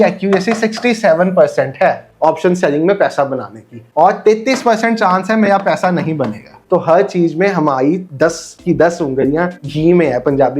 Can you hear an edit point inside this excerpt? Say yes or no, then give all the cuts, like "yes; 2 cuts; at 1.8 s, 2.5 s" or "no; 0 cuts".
yes; 3 cuts; at 6.5 s, 8.1 s, 9.6 s